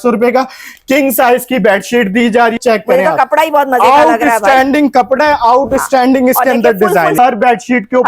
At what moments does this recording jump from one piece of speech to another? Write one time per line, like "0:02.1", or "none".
0:02.6
0:07.1